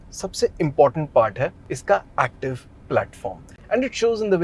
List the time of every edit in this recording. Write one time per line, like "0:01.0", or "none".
0:03.5